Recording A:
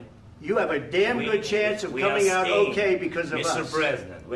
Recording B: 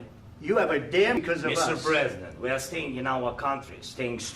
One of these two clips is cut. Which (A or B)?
B